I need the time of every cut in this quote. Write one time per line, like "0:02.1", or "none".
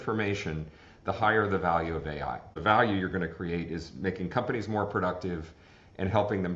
0:02.6